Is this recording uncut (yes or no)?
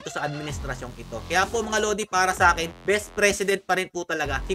yes